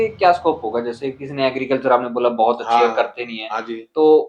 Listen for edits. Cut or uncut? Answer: uncut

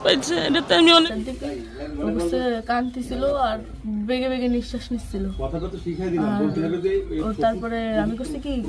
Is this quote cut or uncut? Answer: cut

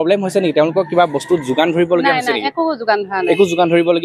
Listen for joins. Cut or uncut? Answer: uncut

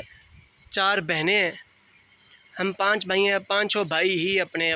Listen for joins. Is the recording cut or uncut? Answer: uncut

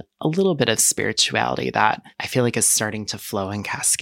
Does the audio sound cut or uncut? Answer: cut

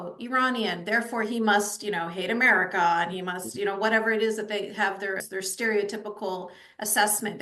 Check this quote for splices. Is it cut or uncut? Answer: cut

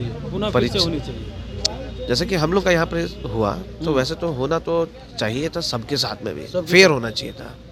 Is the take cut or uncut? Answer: uncut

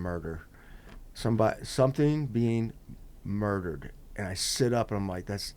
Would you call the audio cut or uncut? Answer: uncut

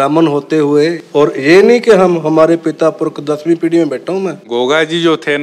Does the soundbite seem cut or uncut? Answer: cut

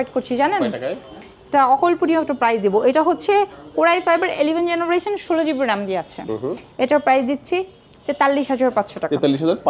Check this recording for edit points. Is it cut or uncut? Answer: uncut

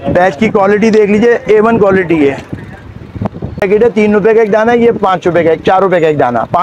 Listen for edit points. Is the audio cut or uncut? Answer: cut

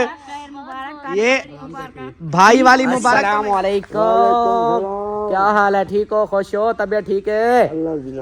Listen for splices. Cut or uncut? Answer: cut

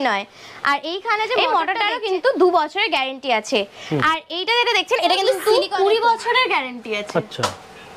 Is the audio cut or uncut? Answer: cut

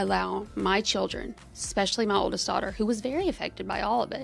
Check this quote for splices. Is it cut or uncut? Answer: uncut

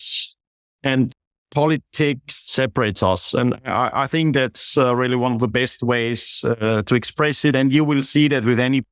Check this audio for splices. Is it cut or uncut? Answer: cut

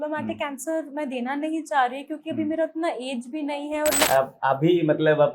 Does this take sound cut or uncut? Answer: cut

